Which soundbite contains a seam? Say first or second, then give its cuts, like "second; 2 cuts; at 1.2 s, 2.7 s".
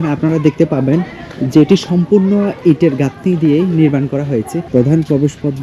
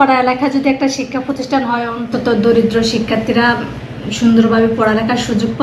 first; 1 cut; at 4.6 s